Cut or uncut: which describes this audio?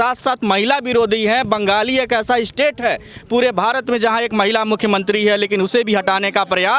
uncut